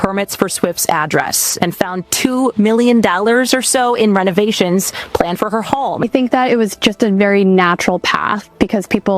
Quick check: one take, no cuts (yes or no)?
no